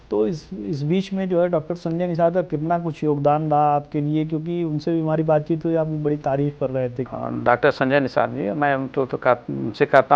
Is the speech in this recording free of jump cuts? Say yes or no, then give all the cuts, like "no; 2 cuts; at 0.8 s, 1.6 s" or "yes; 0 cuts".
no; 1 cut; at 7.1 s